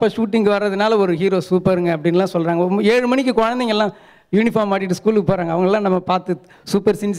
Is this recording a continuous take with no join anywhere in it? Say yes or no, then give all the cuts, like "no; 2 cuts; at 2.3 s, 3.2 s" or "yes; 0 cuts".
yes; 0 cuts